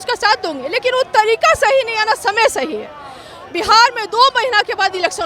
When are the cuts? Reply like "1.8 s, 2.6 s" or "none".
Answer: none

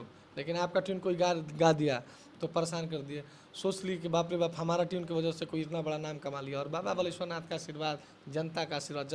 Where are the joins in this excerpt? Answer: none

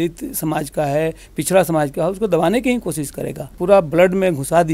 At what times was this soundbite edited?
3.5 s

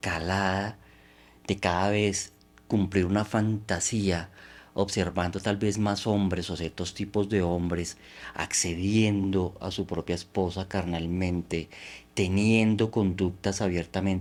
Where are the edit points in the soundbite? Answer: none

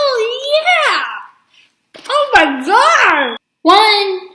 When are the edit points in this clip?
3.4 s

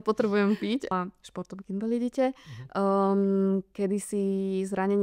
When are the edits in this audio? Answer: 0.9 s

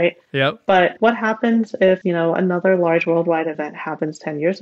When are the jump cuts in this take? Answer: 0.9 s, 2.0 s

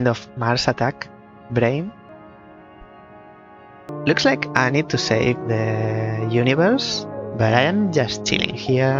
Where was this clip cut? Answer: 2.1 s, 3.9 s

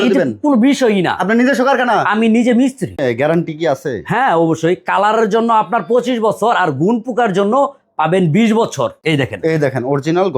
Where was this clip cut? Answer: 3.0 s, 9.0 s

